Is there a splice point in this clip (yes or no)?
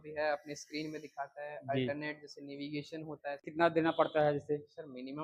yes